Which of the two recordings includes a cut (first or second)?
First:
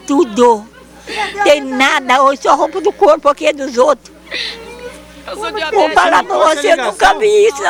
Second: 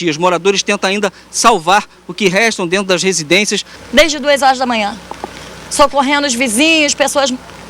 second